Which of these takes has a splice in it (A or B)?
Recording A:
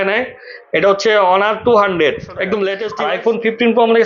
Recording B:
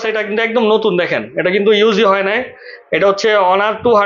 A